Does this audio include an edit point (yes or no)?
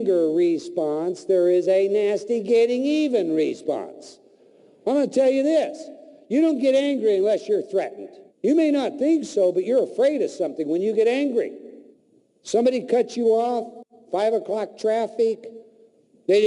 yes